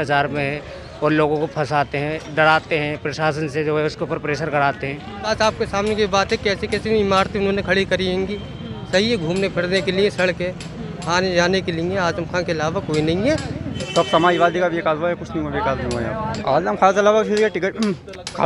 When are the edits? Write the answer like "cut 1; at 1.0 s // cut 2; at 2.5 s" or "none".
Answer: cut 1; at 5.3 s // cut 2; at 13.8 s // cut 3; at 16.3 s